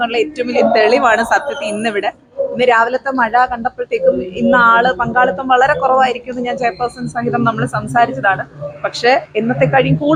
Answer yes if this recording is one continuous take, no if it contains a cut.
yes